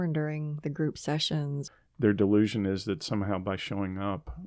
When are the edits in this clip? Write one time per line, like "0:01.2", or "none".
0:01.6